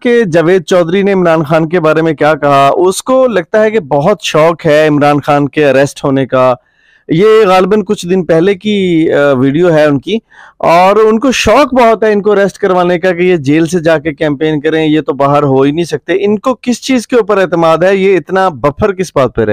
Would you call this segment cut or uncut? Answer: uncut